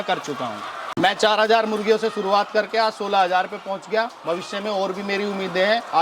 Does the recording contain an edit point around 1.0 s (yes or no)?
yes